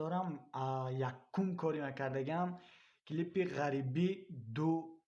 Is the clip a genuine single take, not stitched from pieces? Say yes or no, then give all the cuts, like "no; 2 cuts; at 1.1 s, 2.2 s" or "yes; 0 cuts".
yes; 0 cuts